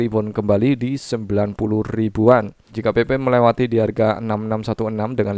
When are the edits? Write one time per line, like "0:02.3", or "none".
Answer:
0:02.7